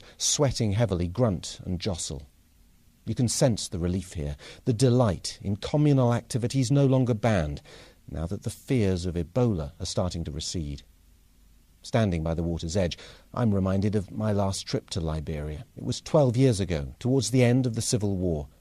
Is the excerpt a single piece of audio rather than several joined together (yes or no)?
yes